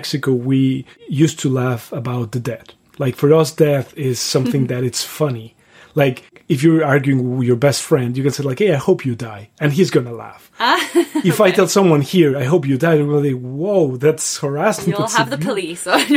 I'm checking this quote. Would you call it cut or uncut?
cut